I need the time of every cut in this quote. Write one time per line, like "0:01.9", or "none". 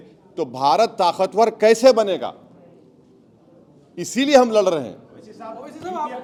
none